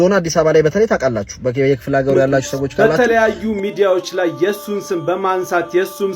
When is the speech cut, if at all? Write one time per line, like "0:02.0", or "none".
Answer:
0:02.8